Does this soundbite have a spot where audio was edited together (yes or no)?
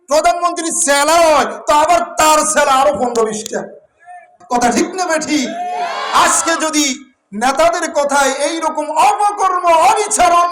yes